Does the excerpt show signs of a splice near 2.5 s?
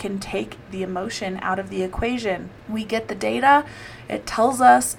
yes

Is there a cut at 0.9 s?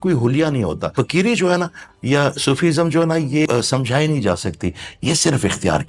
yes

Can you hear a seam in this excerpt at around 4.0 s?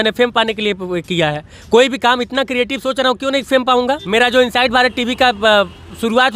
yes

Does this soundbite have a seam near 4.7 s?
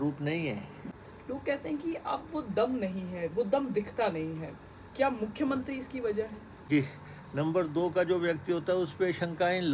no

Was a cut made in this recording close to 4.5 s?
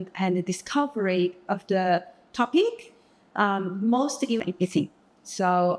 yes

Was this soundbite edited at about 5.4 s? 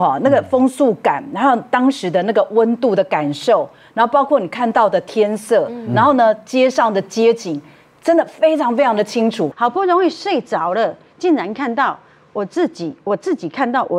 no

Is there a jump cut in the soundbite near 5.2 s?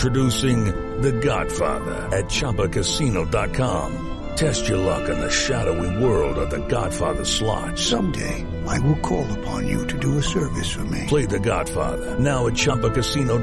no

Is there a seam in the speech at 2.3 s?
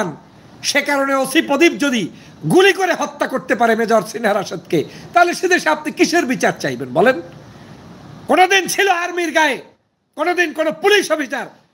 no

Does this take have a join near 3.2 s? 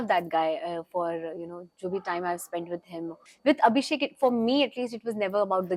yes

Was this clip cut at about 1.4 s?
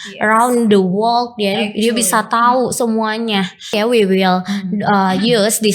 no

